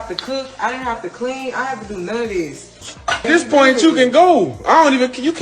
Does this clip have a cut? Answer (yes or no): yes